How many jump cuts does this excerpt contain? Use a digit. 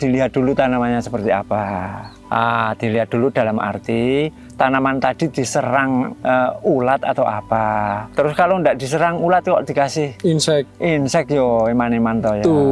0